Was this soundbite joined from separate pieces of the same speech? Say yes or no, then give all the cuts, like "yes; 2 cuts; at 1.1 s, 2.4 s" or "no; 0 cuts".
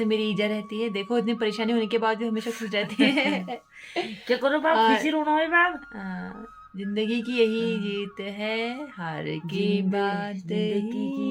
no; 0 cuts